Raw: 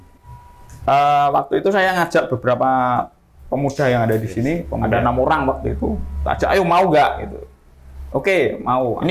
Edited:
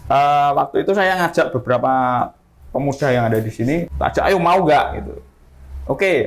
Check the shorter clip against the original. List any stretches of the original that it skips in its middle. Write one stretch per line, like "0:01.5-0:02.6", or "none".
0:04.7-0:06.1